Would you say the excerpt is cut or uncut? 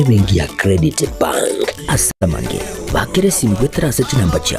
uncut